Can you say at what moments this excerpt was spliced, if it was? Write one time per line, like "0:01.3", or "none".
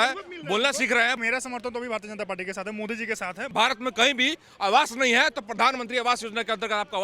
0:01.1
0:03.5

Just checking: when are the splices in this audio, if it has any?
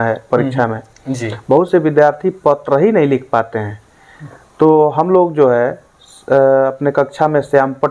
none

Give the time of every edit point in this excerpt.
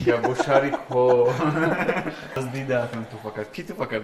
0:02.4

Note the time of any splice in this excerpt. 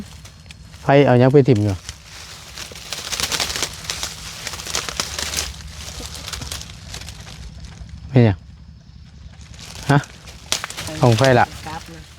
0:10.9

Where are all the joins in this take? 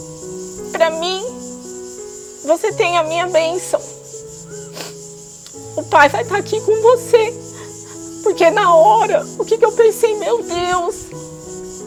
none

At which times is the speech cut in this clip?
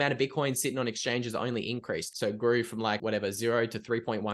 0:02.1
0:03.0

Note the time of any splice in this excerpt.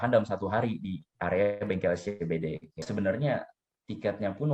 0:02.8

